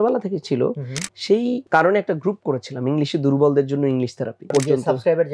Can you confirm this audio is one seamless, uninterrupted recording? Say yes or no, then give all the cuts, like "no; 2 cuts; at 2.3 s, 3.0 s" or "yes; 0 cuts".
no; 2 cuts; at 1.6 s, 4.5 s